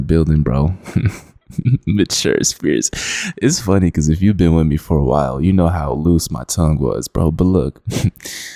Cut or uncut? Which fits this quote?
uncut